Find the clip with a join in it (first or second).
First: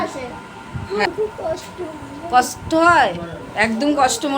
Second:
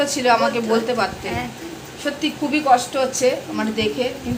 first